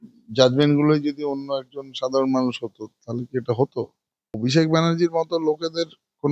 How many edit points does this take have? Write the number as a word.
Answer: one